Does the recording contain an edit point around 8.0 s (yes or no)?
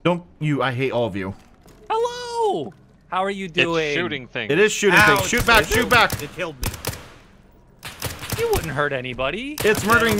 no